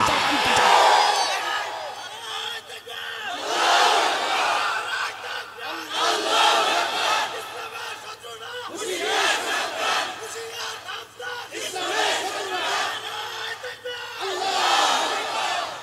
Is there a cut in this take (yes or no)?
no